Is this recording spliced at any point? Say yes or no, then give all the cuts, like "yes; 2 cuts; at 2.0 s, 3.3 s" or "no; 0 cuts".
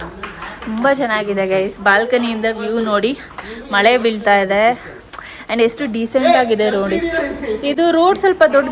no; 0 cuts